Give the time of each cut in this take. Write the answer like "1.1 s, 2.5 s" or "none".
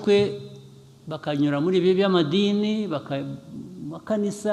none